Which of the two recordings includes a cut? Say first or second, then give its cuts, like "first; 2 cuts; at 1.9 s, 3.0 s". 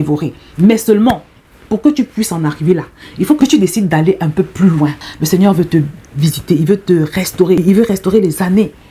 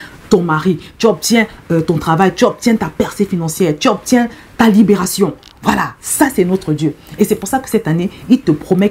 first; 2 cuts; at 3.4 s, 5.1 s